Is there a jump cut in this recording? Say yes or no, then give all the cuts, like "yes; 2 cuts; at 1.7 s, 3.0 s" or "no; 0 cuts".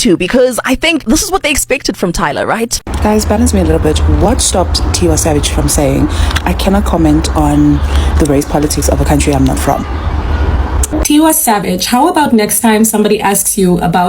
yes; 2 cuts; at 2.8 s, 10.9 s